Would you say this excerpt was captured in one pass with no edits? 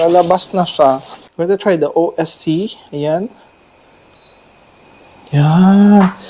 no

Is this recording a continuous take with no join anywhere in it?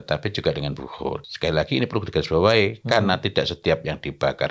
no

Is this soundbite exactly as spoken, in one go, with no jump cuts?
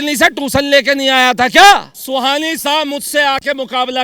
no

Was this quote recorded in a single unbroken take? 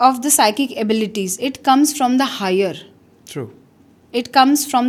yes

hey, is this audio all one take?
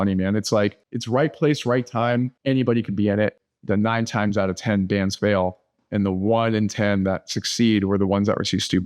no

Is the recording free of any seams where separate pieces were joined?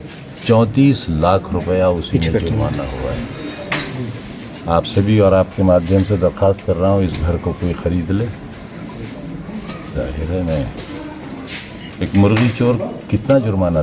yes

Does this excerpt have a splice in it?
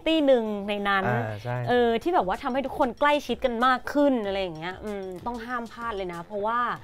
yes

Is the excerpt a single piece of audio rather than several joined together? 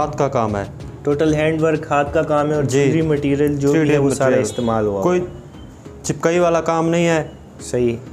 yes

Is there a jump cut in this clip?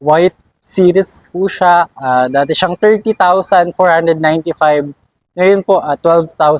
no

